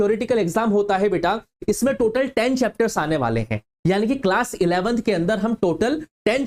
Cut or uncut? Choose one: uncut